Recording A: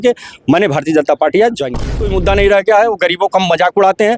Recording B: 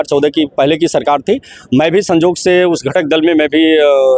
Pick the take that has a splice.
A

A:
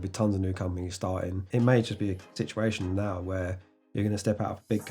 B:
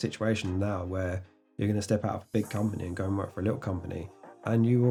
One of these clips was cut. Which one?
A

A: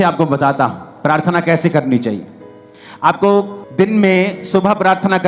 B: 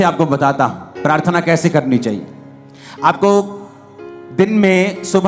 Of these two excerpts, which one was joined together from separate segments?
A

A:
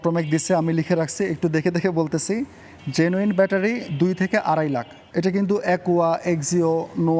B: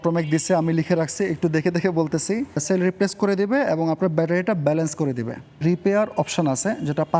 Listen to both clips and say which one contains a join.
B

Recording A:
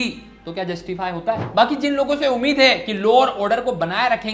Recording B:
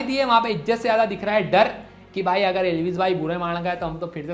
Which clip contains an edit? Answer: A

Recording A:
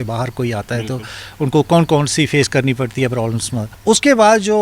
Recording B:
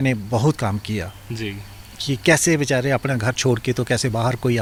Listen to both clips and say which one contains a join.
A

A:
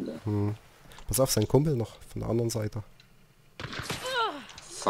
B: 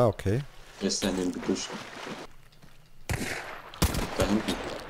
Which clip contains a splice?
B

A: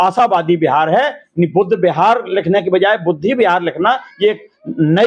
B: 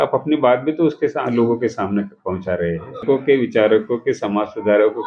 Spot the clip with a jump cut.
B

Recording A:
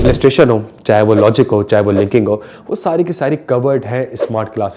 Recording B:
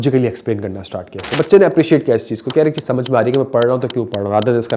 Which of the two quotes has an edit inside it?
B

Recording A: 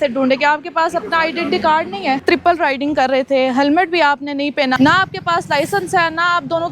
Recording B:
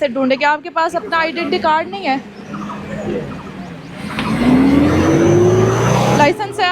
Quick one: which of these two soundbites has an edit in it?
A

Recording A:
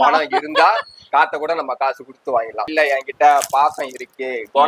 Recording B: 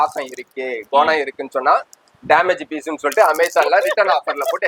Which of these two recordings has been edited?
A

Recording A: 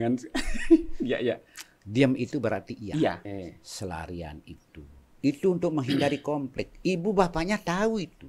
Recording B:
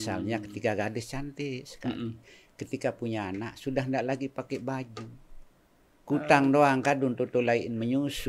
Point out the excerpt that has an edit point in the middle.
A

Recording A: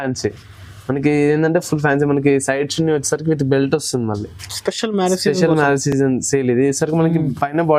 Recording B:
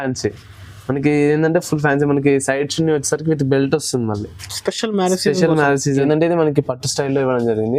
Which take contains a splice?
B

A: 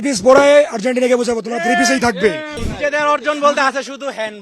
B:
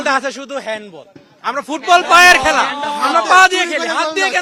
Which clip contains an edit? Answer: A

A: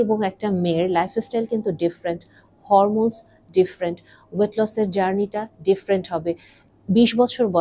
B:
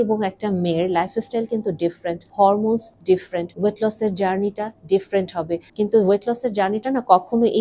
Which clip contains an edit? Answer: B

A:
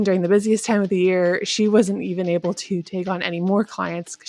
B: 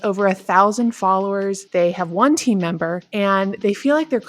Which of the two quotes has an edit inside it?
B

